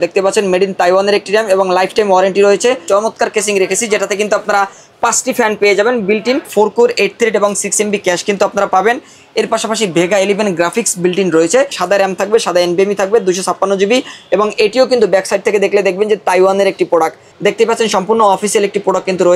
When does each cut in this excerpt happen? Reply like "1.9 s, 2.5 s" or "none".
2.8 s, 6.5 s, 11.8 s, 17.2 s